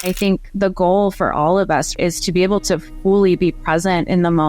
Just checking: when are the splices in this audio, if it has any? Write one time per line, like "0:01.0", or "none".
0:02.0